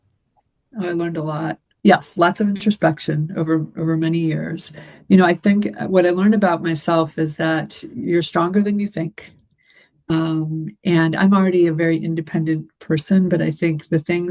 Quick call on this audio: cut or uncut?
cut